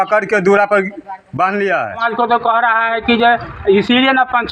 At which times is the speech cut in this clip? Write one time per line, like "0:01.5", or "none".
0:02.0